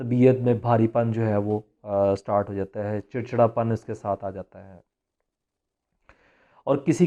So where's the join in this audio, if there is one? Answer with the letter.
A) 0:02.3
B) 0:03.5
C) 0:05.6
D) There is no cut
D